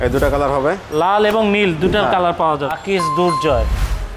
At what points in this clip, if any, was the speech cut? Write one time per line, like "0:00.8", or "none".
0:02.7

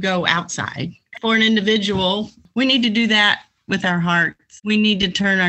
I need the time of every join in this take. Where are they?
0:01.1
0:02.4
0:04.5

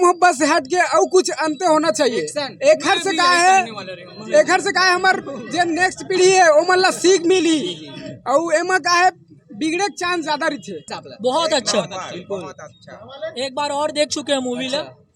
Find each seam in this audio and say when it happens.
0:10.9

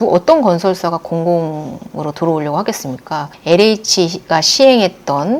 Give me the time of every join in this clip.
0:03.4

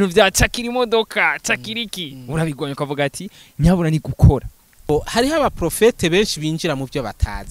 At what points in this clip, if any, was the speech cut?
0:04.9

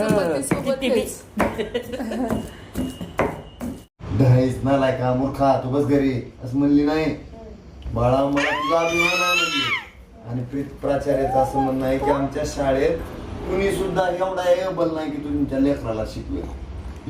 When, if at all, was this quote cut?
0:03.9

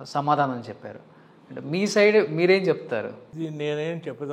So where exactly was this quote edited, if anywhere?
0:03.3

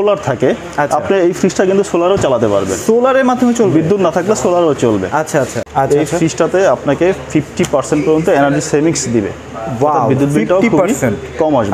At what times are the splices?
0:05.6

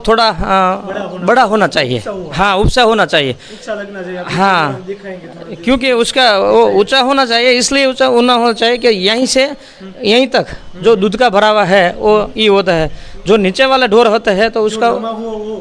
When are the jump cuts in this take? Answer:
none

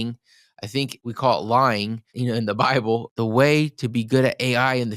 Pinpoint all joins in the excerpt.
0:01.0
0:02.1
0:03.1

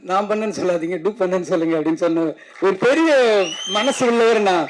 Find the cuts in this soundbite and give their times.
0:02.4

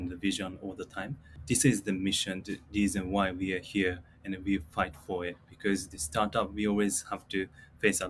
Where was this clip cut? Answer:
0:01.3

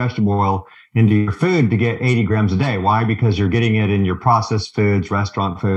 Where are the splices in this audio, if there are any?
none

